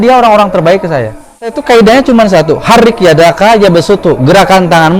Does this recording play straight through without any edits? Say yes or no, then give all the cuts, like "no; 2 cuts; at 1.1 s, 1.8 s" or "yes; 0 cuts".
no; 1 cut; at 1.6 s